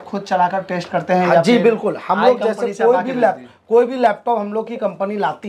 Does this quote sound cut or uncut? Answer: uncut